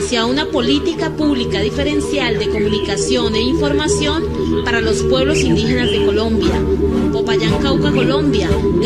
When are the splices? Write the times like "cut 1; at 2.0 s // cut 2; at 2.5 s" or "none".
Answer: cut 1; at 7.5 s